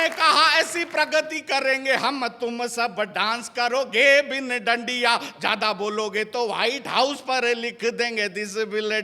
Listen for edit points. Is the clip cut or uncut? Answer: uncut